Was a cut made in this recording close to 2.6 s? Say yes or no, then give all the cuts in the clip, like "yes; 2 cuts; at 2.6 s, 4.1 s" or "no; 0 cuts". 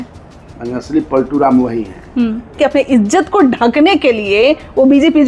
yes; 1 cut; at 2.6 s